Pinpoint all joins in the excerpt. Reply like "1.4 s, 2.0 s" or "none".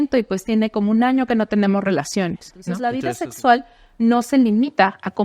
2.7 s